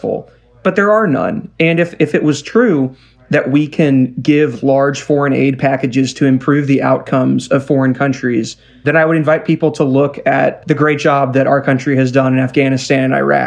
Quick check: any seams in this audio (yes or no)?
yes